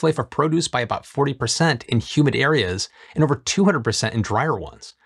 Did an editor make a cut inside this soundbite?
no; 0 cuts

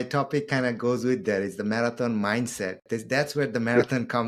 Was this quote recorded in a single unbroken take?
yes; 0 cuts

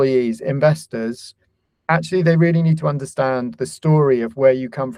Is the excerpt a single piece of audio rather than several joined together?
yes; 0 cuts

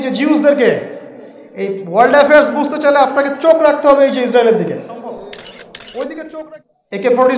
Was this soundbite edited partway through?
yes; 1 cut; at 6.5 s

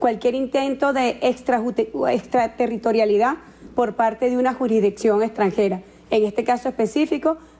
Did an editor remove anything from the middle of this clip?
yes; 1 cut; at 1.2 s

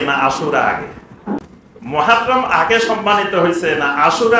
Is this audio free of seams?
no; 1 cut; at 1.4 s

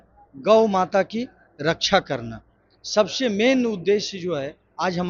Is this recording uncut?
yes; 0 cuts

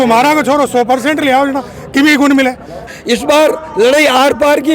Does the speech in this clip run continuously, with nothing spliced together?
no; 1 cut; at 2.9 s

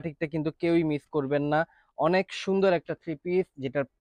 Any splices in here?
no; 0 cuts

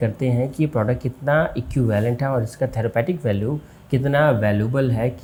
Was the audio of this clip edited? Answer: no; 0 cuts

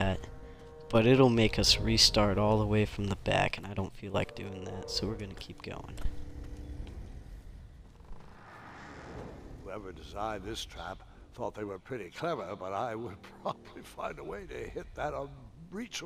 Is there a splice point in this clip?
no; 0 cuts

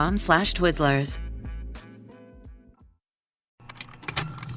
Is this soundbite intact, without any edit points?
no; 1 cut; at 3.5 s

